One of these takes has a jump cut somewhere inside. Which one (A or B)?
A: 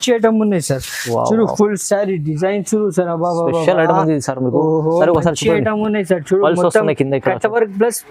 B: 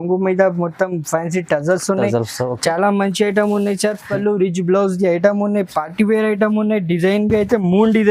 B